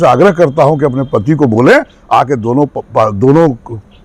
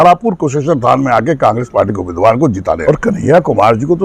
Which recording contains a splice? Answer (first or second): second